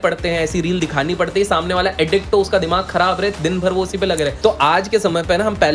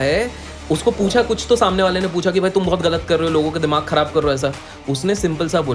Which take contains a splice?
first; 1 cut; at 4.3 s

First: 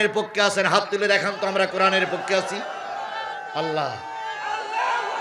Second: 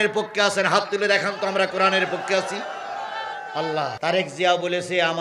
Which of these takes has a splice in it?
second; 1 cut; at 3.9 s

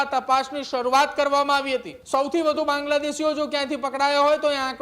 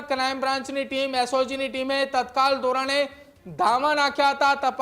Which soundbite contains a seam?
first; 1 cut; at 1.9 s

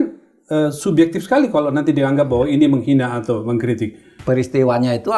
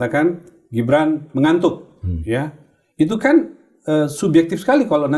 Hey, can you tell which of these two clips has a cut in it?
first; 1 cut; at 4.1 s

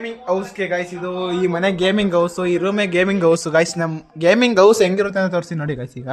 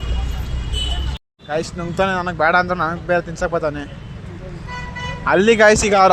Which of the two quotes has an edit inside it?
second; 1 cut; at 1.2 s

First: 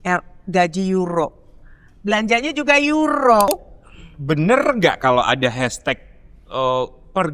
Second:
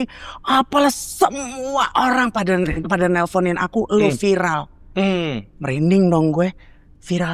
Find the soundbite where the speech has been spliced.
first; 1 cut; at 3.5 s

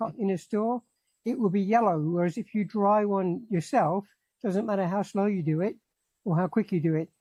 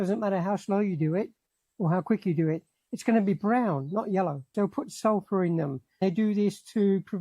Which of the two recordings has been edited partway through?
second; 2 cuts; at 4.5 s, 6.0 s

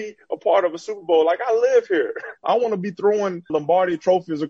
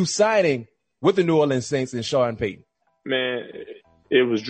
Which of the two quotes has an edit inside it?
first; 2 cuts; at 2.4 s, 3.5 s

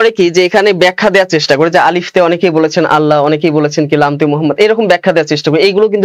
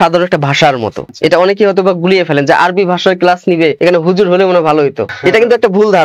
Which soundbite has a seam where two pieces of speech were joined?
second; 3 cuts; at 1.0 s, 3.8 s, 5.1 s

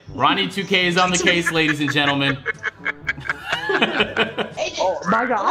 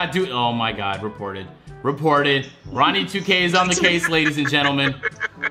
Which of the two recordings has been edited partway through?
first; 1 cut; at 4.5 s

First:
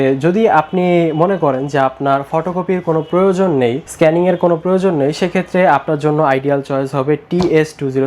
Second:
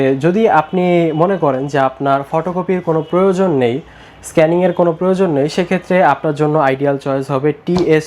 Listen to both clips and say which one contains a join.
first; 1 cut; at 3.8 s

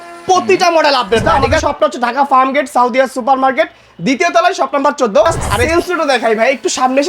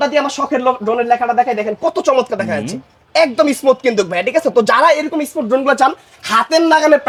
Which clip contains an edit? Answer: first; 2 cuts; at 1.2 s, 5.7 s

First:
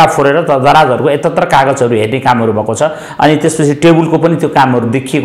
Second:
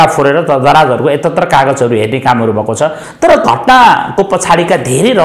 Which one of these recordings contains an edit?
second; 1 cut; at 3.0 s

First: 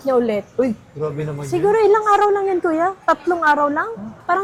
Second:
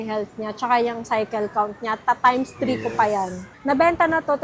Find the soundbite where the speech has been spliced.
second; 1 cut; at 3.3 s

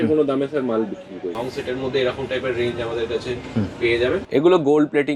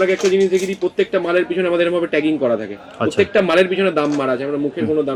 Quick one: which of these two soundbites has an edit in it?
first; 2 cuts; at 1.4 s, 4.3 s

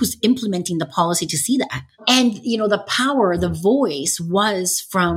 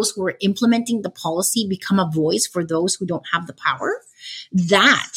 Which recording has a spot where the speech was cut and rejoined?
first; 1 cut; at 2.0 s

